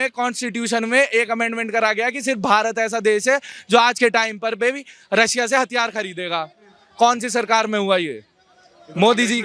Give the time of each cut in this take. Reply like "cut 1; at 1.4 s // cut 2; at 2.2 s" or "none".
none